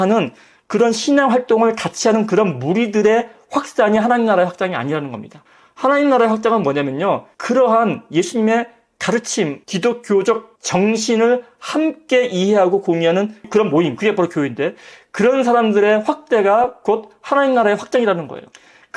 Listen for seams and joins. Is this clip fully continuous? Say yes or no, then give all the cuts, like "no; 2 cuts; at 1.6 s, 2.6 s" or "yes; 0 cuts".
no; 1 cut; at 13.5 s